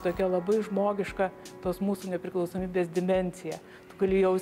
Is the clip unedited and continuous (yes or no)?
yes